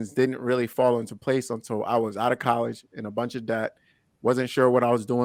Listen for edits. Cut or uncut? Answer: uncut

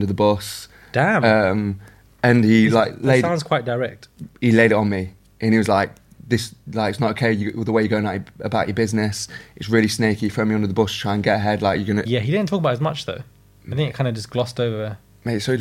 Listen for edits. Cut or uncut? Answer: cut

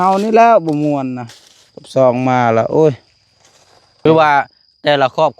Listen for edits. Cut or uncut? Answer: cut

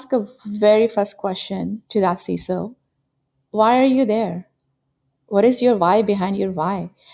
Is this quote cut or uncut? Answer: cut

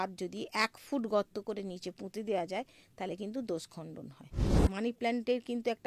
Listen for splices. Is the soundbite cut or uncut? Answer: cut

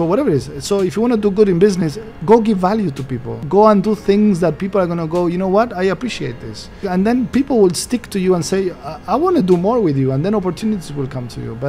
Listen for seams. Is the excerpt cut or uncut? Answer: cut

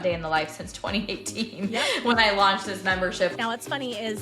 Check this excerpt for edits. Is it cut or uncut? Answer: cut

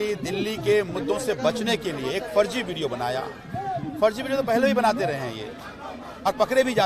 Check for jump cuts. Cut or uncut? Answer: uncut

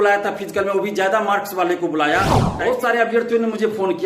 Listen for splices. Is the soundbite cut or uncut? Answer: cut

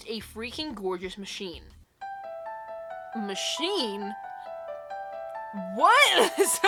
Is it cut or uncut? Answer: uncut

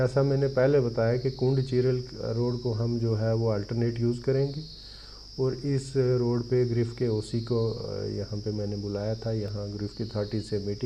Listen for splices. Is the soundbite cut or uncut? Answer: uncut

